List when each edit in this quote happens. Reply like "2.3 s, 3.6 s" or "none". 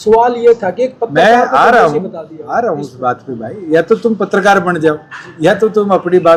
none